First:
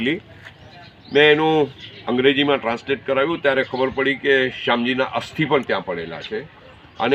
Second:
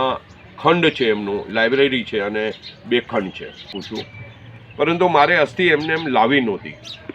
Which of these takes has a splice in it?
second; 1 cut; at 3.8 s

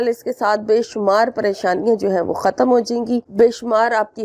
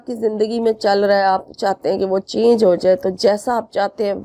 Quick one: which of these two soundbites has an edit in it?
first; 1 cut; at 3.3 s

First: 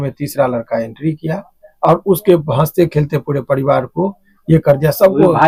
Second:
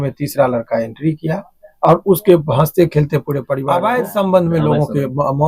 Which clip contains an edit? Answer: second; 1 cut; at 3.6 s

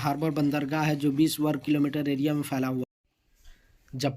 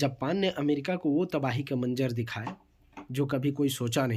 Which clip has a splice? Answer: first; 1 cut; at 2.8 s

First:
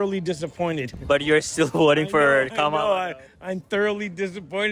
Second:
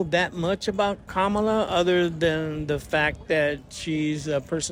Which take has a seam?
first; 1 cut; at 1.0 s

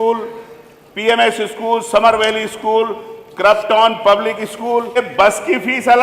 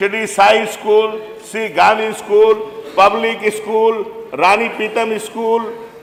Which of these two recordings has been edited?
first; 1 cut; at 5.0 s

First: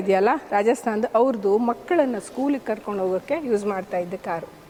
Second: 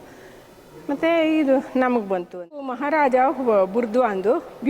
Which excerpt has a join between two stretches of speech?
second; 1 cut; at 2.8 s

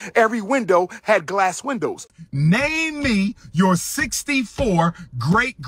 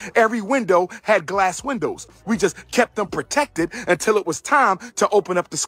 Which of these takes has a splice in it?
first; 1 cut; at 2.1 s

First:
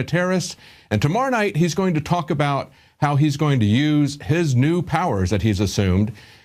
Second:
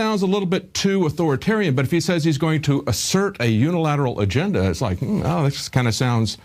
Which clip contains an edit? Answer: first; 1 cut; at 5.4 s

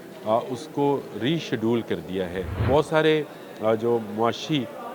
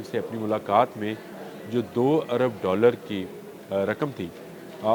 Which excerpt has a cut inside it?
first; 1 cut; at 2.6 s

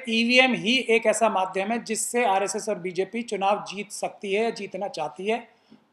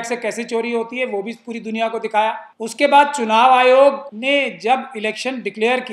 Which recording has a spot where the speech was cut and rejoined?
second; 2 cuts; at 2.5 s, 4.1 s

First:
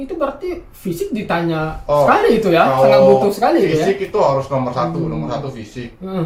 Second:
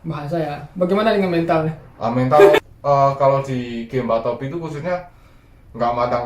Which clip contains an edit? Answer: second; 1 cut; at 2.6 s

